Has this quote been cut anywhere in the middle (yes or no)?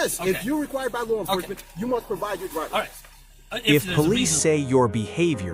no